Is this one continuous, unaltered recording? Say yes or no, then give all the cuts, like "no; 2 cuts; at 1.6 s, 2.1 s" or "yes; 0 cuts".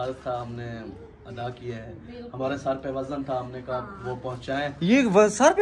yes; 0 cuts